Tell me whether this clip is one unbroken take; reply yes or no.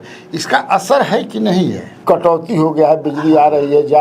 no